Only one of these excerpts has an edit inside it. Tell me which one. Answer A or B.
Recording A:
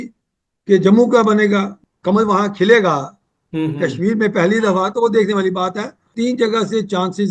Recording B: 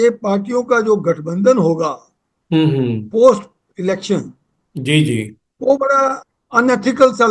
A